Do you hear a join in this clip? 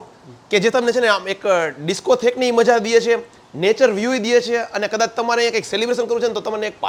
no; 0 cuts

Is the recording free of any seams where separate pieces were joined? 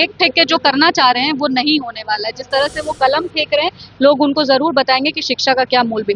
yes; 0 cuts

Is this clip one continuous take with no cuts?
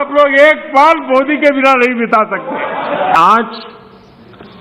no; 1 cut; at 3.1 s

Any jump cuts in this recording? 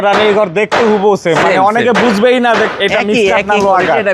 no; 0 cuts

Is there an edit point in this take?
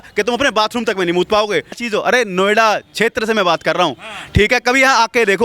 yes; 1 cut; at 1.8 s

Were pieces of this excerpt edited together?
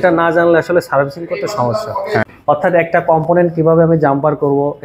yes; 1 cut; at 2.2 s

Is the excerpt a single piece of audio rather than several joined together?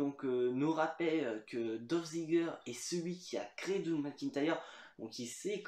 yes; 0 cuts

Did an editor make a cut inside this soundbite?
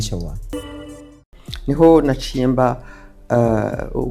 yes; 1 cut; at 1.0 s

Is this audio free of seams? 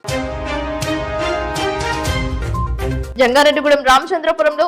no; 1 cut; at 3.0 s

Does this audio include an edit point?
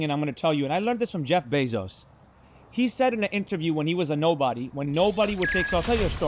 no; 0 cuts

